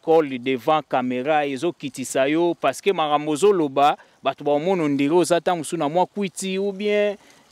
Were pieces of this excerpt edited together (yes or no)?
no